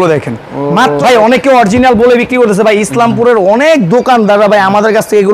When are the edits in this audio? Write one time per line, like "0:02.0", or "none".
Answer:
0:01.0